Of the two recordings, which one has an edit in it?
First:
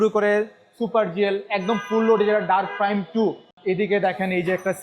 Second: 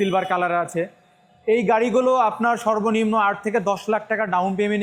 first; 1 cut; at 3.5 s

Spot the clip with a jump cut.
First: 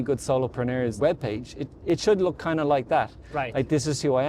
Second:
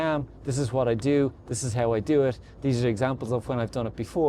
first; 1 cut; at 1.0 s

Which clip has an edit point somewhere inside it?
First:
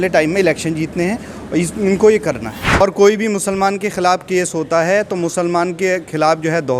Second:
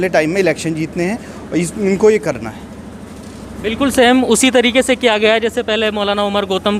first; 1 cut; at 2.8 s

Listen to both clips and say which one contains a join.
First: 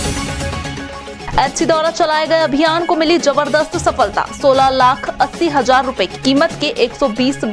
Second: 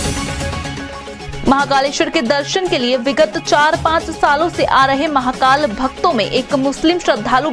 second; 1 cut; at 1.2 s

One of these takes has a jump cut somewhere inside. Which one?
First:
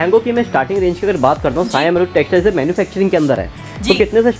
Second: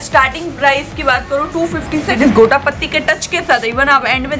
second; 1 cut; at 2.1 s

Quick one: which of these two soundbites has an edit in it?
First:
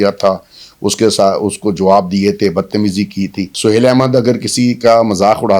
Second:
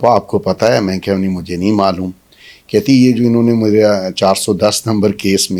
first; 1 cut; at 3.4 s

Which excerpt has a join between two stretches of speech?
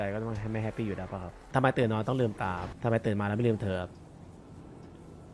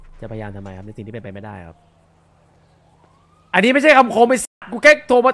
first; 2 cuts; at 1.5 s, 2.7 s

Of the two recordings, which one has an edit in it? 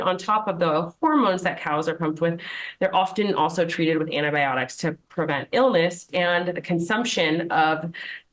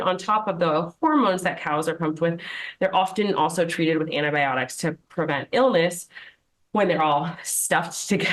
first; 1 cut; at 6.1 s

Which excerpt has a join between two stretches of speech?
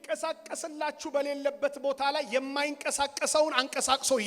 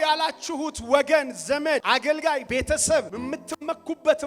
second; 2 cuts; at 2.3 s, 3.1 s

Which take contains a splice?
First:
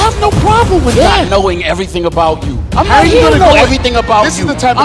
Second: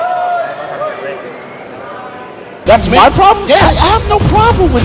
second; 1 cut; at 2.6 s

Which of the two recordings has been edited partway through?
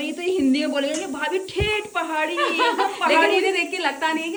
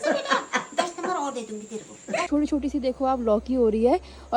second; 1 cut; at 2.3 s

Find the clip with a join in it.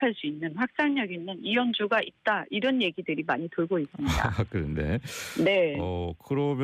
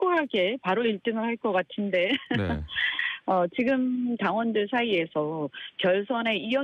second; 1 cut; at 3.8 s

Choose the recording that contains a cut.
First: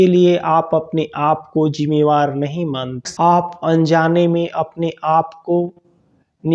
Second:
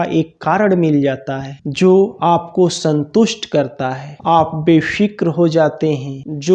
first; 1 cut; at 3.1 s

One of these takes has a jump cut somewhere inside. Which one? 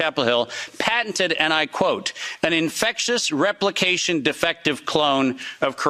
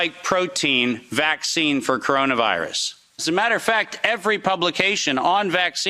second; 1 cut; at 3.2 s

